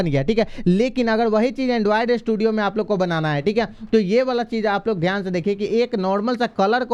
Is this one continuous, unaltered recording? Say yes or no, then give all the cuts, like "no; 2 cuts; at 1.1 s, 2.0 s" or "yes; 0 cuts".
yes; 0 cuts